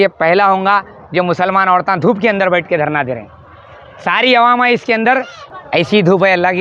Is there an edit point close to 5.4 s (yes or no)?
yes